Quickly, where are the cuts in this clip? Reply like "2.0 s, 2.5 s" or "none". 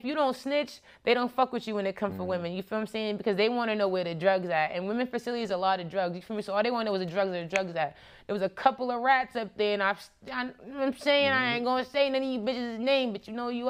none

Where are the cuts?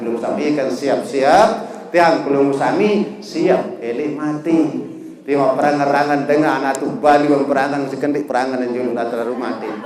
none

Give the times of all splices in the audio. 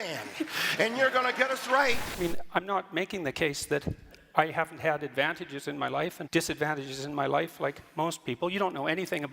2.1 s, 6.2 s

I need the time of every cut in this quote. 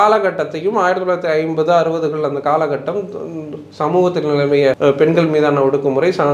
4.8 s

